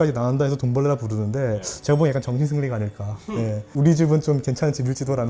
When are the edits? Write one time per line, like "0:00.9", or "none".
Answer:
none